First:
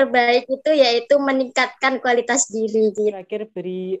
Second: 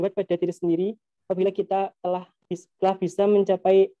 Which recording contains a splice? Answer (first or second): first